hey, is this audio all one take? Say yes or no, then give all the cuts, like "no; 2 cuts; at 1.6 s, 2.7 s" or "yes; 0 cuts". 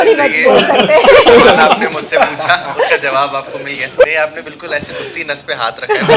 no; 1 cut; at 4.0 s